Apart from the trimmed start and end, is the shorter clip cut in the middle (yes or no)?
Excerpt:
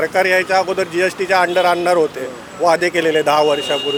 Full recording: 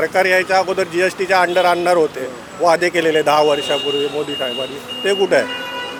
no